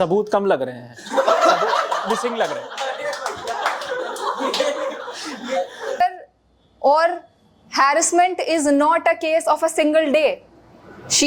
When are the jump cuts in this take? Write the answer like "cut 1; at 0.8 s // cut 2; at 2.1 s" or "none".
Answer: cut 1; at 6.0 s